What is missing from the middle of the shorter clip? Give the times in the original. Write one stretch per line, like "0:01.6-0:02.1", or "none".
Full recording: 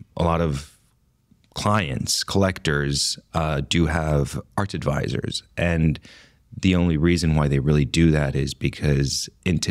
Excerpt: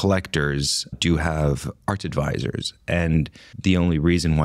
0:03.3-0:03.6
0:06.1-0:06.4